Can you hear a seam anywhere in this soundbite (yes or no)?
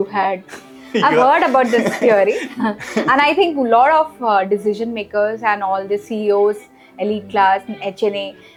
no